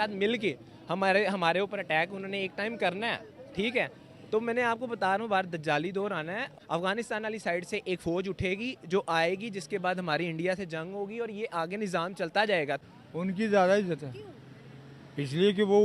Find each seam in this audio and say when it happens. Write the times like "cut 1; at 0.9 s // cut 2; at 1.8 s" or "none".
cut 1; at 6.5 s // cut 2; at 12.8 s